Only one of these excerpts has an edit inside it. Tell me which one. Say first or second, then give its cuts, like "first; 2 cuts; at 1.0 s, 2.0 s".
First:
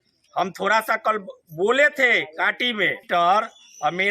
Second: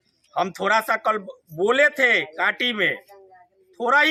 first; 1 cut; at 3.0 s